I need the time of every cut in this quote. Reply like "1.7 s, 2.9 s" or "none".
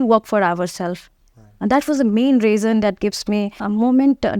none